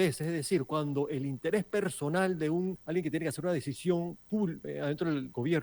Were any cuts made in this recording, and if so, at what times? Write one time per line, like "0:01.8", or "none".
0:02.8
0:04.6